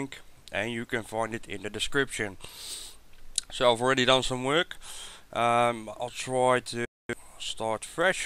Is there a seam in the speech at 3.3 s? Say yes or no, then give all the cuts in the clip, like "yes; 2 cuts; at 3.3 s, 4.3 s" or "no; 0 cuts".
no; 0 cuts